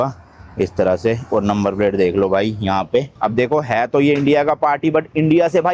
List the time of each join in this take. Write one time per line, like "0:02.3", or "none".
0:03.2